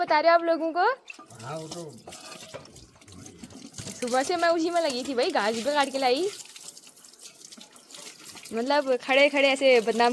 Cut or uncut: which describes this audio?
uncut